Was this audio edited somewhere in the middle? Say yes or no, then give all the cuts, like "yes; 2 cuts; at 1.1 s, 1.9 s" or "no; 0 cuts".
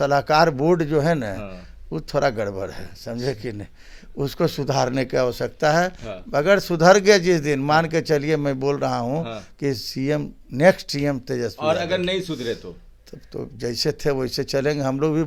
no; 0 cuts